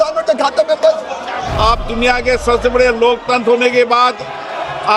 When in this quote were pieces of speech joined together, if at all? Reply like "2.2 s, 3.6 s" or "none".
1.5 s